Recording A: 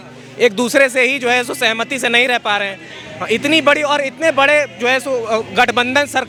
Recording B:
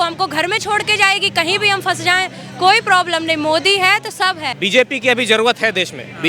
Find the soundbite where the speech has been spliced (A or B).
B